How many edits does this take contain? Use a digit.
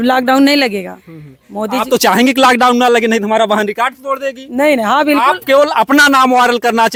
0